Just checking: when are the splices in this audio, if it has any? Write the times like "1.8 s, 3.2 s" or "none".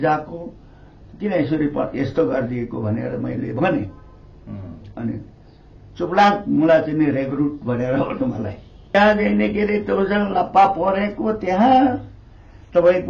8.9 s